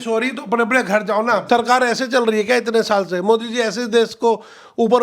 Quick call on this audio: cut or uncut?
cut